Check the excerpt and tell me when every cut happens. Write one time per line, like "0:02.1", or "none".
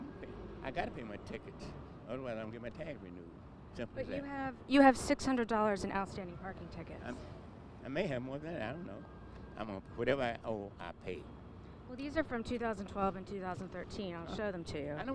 none